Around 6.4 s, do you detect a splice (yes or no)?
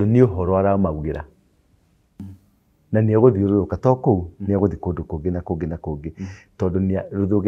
no